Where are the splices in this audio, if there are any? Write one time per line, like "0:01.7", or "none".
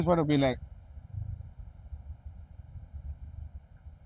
none